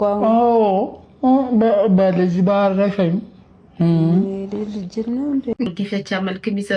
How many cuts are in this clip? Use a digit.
1